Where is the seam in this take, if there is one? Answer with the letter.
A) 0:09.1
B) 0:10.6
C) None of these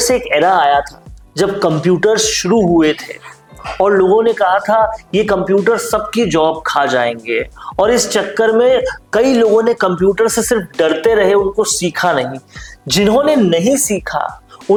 C